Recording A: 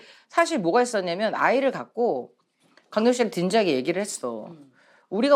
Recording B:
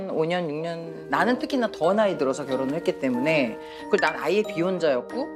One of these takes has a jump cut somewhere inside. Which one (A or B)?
B